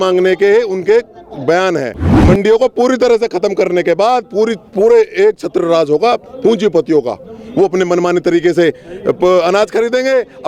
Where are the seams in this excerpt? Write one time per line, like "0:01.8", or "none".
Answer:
0:02.1